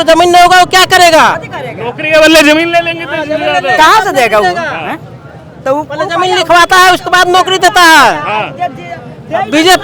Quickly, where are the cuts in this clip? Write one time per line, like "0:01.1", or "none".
none